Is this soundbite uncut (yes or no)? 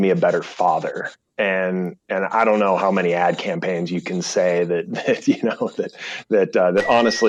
yes